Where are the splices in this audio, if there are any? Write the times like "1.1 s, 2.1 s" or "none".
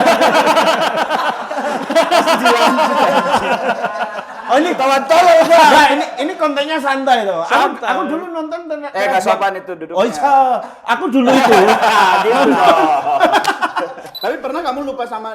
14.1 s